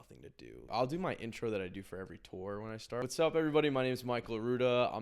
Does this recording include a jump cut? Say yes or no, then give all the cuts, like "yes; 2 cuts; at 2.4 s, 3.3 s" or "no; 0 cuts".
yes; 2 cuts; at 0.7 s, 3.0 s